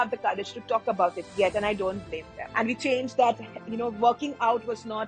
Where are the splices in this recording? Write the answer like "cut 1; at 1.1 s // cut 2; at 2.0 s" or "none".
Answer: cut 1; at 2.4 s